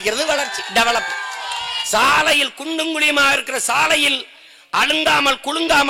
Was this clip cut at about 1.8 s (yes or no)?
yes